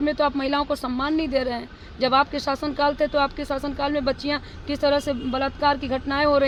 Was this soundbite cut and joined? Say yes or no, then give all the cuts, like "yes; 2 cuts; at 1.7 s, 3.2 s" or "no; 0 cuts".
no; 0 cuts